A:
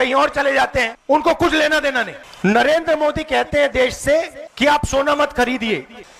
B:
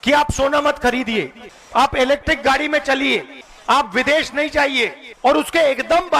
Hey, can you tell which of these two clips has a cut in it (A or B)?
A